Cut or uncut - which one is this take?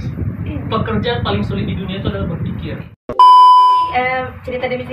cut